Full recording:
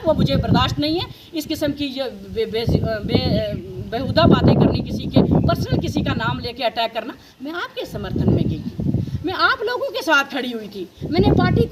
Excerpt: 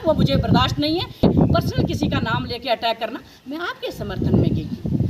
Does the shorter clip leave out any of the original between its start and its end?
yes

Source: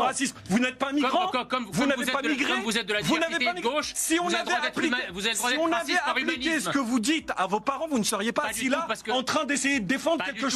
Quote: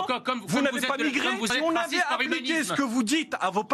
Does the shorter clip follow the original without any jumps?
no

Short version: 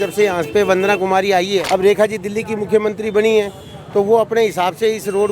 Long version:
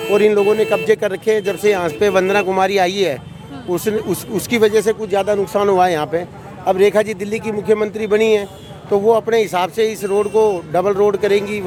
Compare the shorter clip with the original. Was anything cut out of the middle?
yes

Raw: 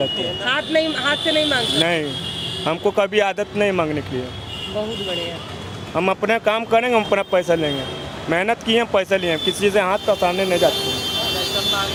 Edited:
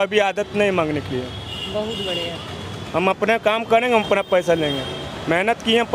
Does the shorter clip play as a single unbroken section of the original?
yes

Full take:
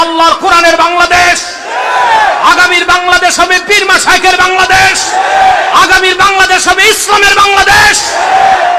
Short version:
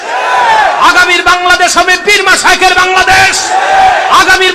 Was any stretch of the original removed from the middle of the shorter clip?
no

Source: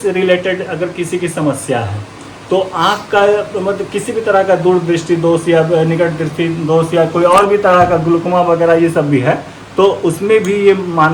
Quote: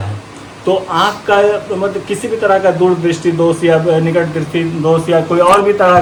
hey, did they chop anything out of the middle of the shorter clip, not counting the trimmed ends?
no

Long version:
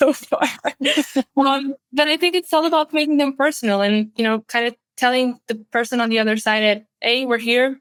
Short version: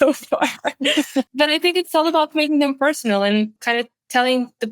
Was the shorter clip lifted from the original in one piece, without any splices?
no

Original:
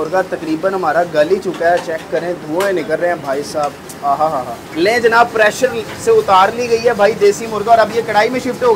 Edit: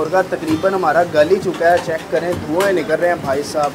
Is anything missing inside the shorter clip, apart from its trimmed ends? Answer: no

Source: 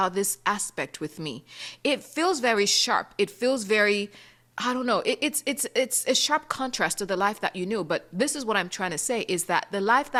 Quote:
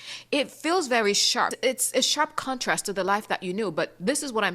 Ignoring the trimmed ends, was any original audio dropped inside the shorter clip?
yes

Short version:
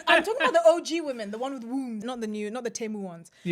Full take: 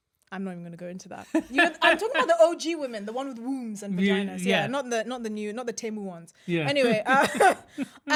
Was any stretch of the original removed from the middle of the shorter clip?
yes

